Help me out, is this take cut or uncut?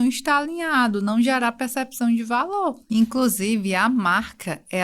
cut